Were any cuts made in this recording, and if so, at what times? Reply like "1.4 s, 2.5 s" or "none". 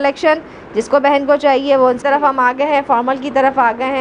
2.0 s